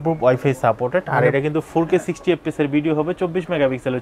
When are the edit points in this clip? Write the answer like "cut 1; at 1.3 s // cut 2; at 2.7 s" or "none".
none